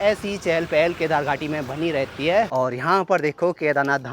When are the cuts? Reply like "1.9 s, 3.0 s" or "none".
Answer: 2.5 s